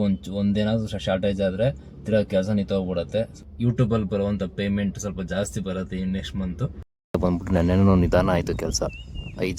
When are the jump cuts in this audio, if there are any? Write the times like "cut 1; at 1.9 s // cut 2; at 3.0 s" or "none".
cut 1; at 3.5 s // cut 2; at 7.2 s